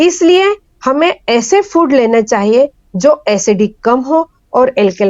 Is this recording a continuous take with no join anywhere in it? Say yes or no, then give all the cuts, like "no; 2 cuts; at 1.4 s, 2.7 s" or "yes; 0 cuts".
yes; 0 cuts